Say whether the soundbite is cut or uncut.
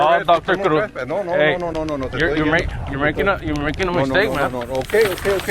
cut